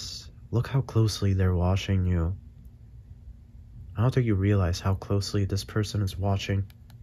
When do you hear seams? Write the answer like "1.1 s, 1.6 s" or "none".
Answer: none